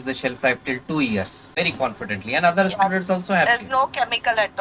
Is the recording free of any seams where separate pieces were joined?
no; 1 cut; at 1.5 s

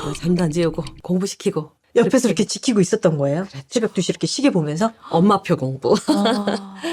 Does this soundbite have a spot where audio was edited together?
no; 0 cuts

